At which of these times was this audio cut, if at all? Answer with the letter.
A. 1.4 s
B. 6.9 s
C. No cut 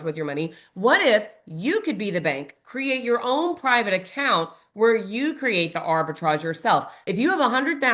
B